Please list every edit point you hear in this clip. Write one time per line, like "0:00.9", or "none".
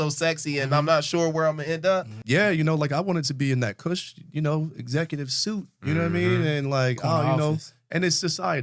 0:02.2